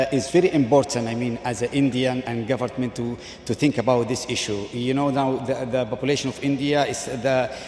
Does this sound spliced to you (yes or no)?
no